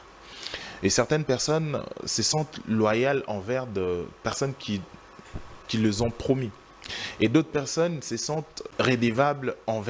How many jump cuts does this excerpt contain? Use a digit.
2